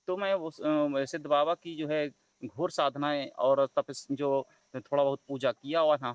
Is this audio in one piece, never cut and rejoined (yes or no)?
yes